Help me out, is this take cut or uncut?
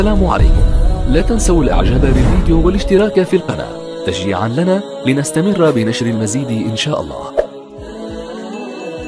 cut